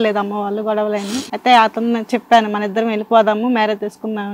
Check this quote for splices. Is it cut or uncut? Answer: cut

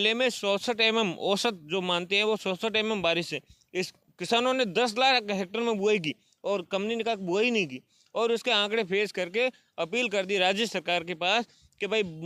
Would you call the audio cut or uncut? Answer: uncut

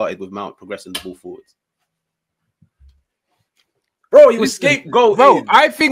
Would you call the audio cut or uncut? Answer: uncut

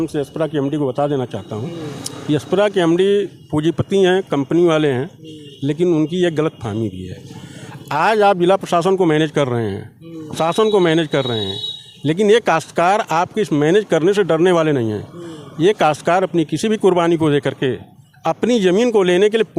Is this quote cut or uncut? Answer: uncut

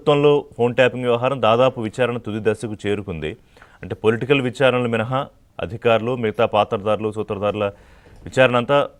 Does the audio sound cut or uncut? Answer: uncut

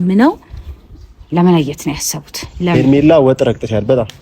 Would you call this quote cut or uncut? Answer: cut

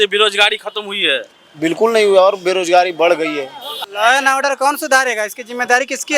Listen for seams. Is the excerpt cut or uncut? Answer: cut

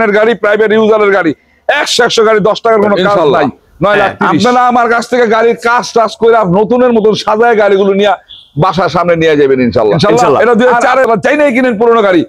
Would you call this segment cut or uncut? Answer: cut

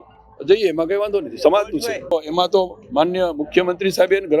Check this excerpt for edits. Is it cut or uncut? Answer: cut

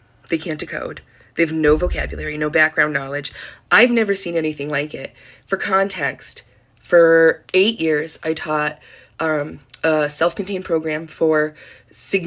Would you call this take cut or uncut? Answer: uncut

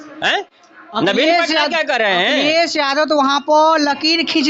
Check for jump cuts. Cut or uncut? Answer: uncut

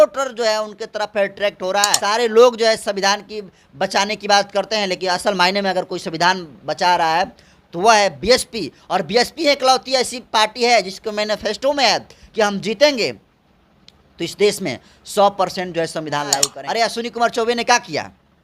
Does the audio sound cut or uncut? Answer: cut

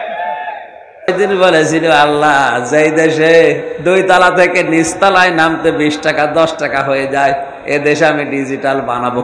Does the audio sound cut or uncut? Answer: cut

